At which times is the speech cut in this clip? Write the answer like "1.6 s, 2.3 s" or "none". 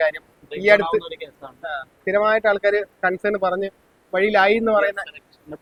none